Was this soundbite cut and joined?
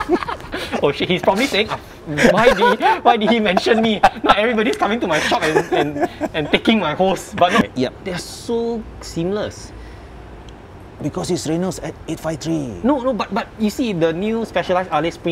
yes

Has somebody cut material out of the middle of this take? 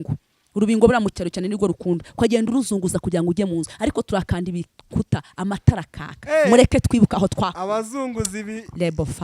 no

